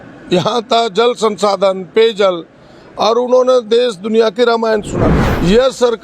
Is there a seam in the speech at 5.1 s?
yes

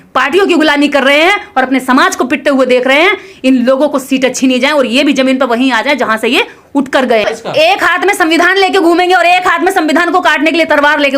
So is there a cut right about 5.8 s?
no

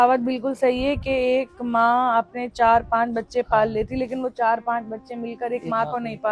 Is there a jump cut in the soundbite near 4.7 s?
no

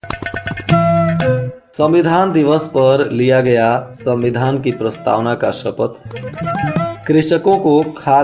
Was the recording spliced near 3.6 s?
no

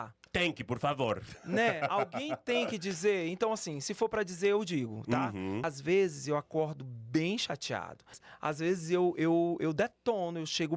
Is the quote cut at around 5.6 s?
yes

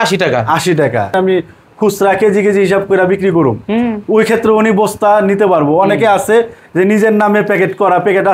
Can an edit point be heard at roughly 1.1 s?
yes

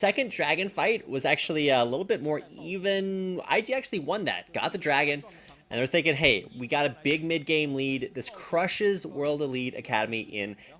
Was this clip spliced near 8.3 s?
yes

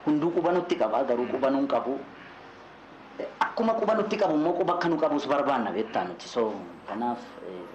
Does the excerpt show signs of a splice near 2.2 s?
no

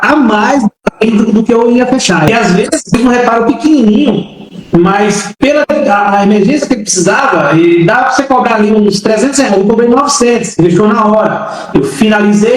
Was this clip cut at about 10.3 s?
no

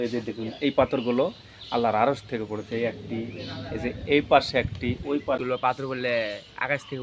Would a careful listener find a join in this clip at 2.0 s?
no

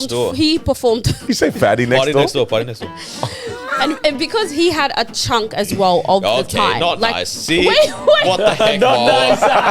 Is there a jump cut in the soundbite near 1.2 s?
yes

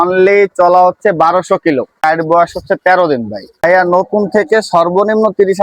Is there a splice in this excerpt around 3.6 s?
yes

